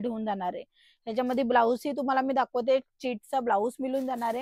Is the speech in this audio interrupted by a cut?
no; 0 cuts

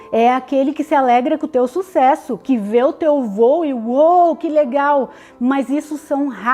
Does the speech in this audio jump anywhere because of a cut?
no; 0 cuts

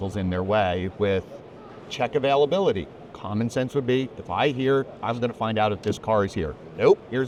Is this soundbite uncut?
yes; 0 cuts

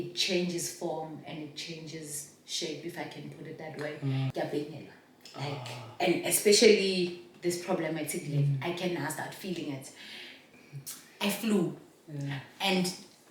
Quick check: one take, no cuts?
no; 2 cuts; at 4.3 s, 10.5 s

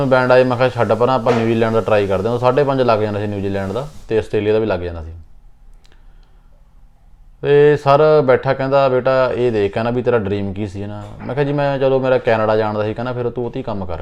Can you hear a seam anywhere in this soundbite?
no; 0 cuts

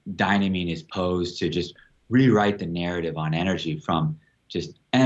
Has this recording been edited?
no; 0 cuts

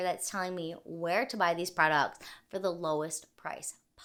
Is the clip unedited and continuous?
yes; 0 cuts

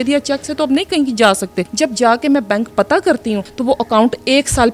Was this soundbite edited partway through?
yes; 2 cuts; at 1.6 s, 3.5 s

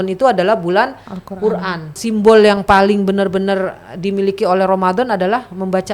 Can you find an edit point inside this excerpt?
yes; 1 cut; at 1.9 s

